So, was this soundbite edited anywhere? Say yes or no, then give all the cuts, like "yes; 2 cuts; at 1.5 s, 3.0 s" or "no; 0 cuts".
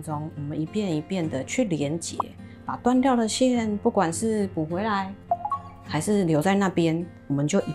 no; 0 cuts